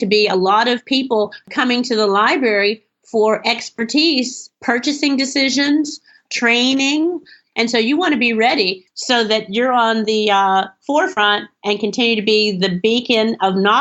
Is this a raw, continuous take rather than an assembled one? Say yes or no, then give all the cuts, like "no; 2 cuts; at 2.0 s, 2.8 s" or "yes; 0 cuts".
no; 1 cut; at 1.4 s